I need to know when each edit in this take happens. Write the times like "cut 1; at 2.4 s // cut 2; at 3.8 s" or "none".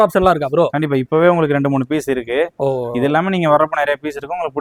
none